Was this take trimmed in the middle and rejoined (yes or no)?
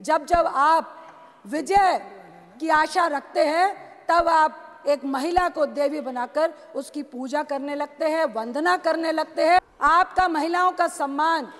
yes